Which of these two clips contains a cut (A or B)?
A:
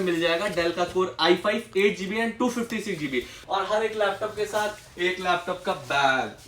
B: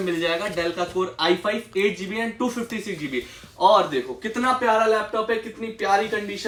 A